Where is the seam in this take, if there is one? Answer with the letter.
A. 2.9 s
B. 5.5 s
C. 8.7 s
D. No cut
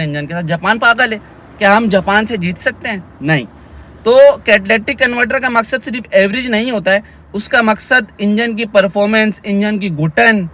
D